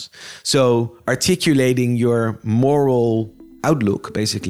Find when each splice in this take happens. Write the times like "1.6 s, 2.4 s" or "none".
3.4 s